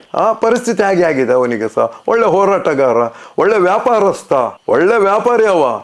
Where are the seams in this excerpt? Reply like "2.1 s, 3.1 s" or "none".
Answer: none